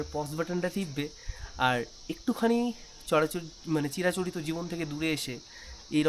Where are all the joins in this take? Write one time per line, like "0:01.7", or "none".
none